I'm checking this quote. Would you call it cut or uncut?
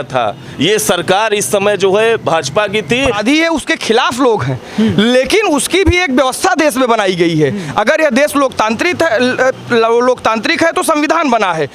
cut